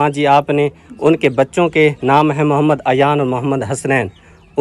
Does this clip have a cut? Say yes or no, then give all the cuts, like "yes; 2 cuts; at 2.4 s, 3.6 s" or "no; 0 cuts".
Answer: no; 0 cuts